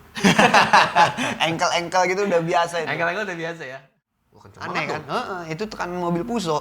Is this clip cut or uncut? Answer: cut